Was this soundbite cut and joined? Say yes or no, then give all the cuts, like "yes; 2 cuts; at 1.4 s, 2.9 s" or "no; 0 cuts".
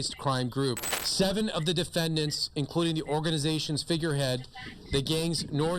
yes; 1 cut; at 0.9 s